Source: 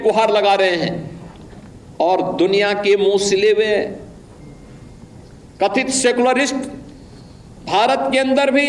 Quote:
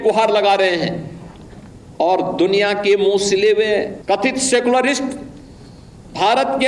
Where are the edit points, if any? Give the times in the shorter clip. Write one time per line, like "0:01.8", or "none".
0:04.0